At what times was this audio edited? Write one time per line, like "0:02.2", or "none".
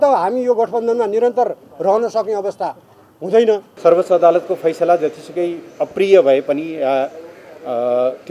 0:03.7